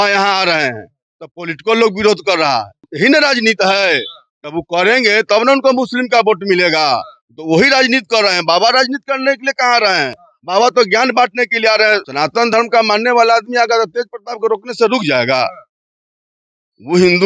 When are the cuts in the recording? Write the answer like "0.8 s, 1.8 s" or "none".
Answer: 2.8 s, 12.0 s

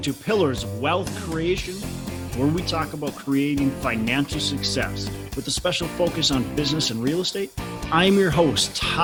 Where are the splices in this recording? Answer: none

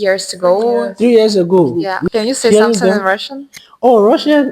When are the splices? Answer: 1.9 s

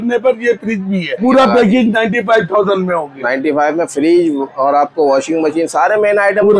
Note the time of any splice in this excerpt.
1.2 s

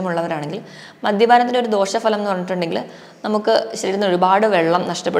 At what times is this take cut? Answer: none

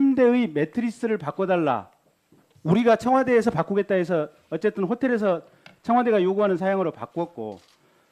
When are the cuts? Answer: 3.0 s

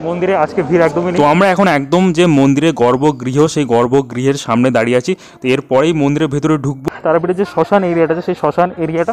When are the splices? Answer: 1.1 s, 6.8 s

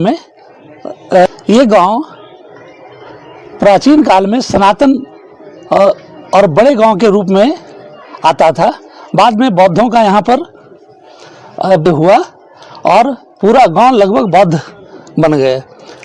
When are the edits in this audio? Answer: 1.3 s, 11.9 s

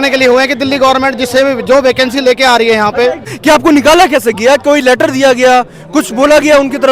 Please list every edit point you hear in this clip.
3.3 s

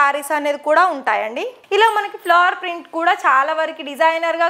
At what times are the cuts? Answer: 1.5 s

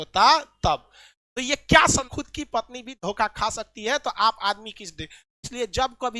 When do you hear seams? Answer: 2.1 s

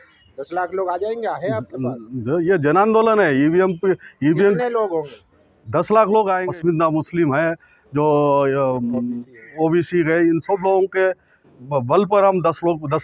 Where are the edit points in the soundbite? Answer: 6.4 s

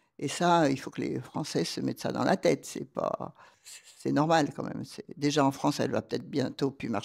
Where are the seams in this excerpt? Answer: none

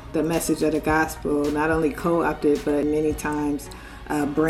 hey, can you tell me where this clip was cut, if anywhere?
2.8 s

